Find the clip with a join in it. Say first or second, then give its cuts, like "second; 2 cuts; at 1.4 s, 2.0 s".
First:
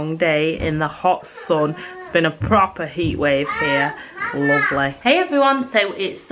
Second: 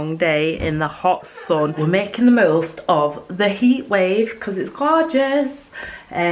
second; 1 cut; at 1.8 s